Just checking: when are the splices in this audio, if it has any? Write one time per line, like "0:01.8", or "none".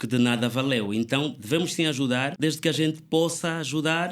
0:02.3